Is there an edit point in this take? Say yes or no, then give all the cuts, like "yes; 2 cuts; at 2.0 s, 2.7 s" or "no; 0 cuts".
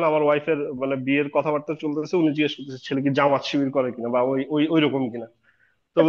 no; 0 cuts